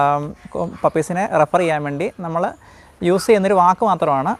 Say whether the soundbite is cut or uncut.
uncut